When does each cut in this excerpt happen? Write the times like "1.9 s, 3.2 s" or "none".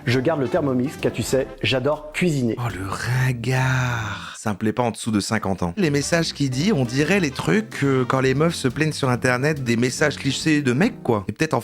4.2 s, 5.8 s, 9.6 s